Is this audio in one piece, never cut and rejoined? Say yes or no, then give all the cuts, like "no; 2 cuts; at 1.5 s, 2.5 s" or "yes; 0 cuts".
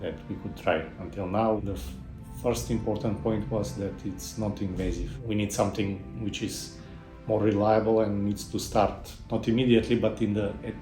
no; 2 cuts; at 1.6 s, 5.1 s